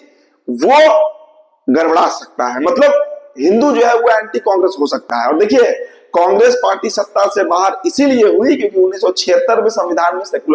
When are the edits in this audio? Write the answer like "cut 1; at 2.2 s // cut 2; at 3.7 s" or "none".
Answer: none